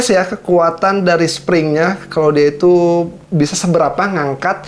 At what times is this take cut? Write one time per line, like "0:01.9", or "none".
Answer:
none